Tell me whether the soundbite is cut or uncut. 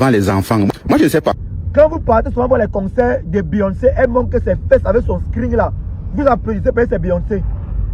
cut